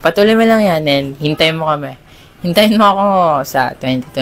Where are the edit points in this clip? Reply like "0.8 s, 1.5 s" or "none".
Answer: none